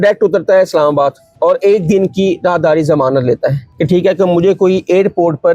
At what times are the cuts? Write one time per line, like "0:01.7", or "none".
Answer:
0:01.2
0:03.7